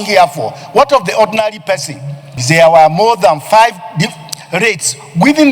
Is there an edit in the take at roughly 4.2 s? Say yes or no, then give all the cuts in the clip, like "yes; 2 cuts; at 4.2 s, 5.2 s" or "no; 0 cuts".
no; 1 cut; at 2.3 s